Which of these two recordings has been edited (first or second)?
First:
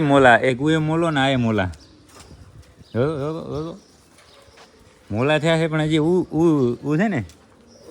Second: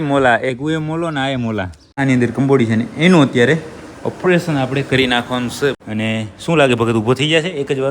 second